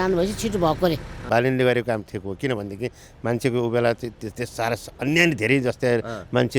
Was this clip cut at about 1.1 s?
yes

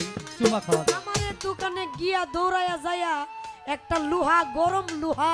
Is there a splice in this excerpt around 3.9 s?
no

